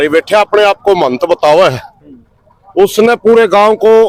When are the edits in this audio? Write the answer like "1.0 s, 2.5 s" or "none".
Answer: none